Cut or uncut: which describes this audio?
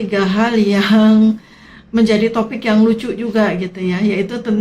uncut